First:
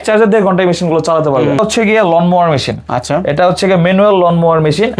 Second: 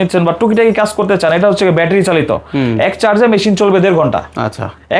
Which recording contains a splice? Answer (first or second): first